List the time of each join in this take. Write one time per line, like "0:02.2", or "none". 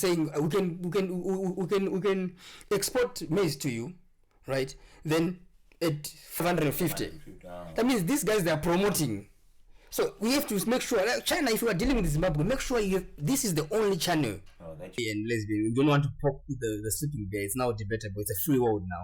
0:06.4
0:15.0